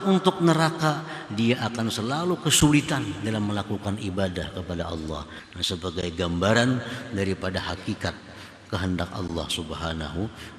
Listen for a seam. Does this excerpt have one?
yes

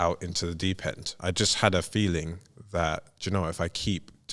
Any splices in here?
yes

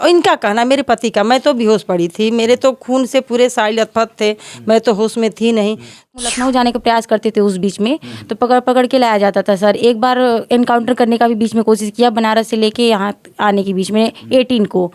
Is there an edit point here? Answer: yes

